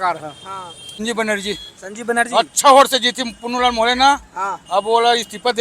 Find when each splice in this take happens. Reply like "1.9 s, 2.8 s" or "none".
0.9 s